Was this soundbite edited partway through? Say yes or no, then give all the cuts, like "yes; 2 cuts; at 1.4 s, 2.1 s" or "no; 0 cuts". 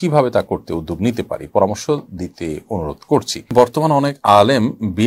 yes; 1 cut; at 3.4 s